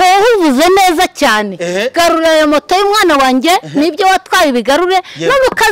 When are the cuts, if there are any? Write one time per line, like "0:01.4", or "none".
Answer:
none